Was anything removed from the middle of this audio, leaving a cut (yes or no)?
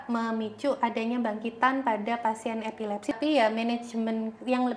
yes